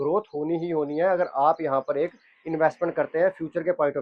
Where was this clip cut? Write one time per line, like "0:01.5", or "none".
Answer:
none